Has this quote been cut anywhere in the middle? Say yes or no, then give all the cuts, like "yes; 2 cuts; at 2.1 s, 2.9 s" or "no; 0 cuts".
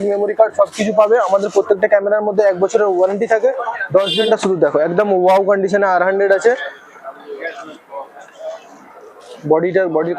yes; 1 cut; at 4.3 s